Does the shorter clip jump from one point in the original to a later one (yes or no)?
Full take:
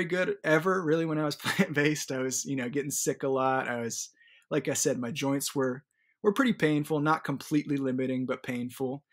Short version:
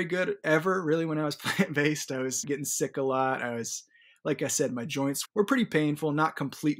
yes